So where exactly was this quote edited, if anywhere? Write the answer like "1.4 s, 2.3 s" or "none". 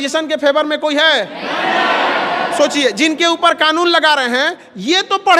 none